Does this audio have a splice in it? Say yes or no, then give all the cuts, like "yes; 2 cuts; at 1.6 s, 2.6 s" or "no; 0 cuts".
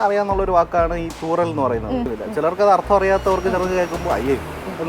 yes; 1 cut; at 2.1 s